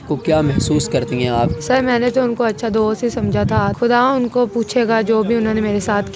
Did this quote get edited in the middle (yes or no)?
yes